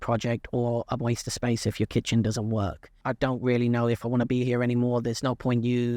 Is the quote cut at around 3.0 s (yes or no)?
yes